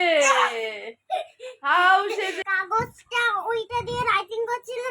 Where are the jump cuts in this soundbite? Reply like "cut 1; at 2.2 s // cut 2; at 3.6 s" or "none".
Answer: cut 1; at 2.4 s